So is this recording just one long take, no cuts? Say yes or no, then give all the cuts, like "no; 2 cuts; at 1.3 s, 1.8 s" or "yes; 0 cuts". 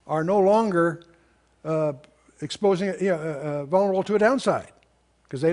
no; 1 cut; at 1.9 s